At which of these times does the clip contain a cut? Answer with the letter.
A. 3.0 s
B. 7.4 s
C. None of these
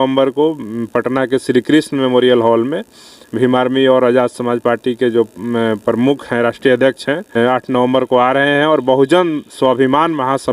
B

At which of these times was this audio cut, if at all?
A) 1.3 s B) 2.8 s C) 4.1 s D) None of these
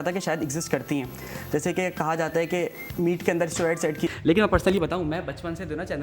C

